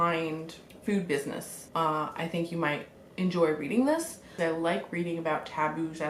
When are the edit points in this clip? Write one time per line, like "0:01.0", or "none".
0:01.5
0:04.4